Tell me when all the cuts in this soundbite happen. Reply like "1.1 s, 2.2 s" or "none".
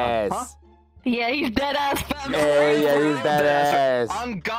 none